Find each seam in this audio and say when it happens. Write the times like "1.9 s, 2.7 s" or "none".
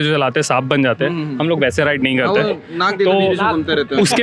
none